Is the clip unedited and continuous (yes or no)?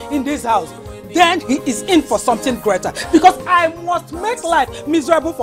yes